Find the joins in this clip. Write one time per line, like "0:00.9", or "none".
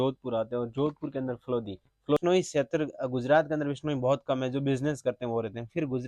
0:02.2